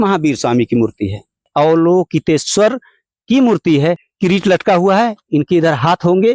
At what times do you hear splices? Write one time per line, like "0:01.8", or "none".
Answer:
0:01.4
0:04.1